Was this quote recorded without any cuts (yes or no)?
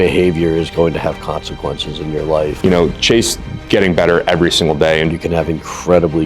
no